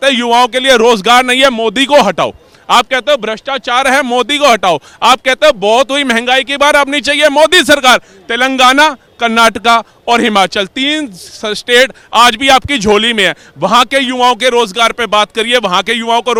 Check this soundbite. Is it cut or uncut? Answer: uncut